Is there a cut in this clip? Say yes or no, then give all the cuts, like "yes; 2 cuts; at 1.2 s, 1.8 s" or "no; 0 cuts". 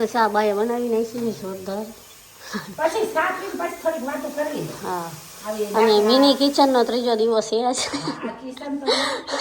no; 0 cuts